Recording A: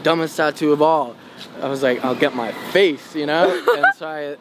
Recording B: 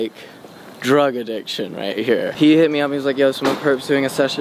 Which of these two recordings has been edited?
B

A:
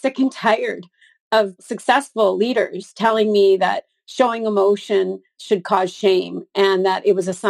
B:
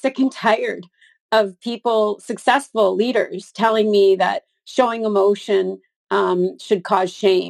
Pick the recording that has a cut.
A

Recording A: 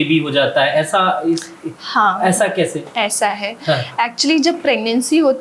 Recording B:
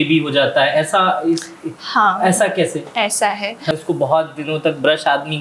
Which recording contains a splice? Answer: B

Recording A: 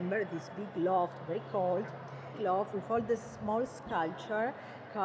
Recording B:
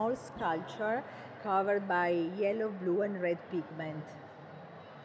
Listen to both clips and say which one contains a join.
A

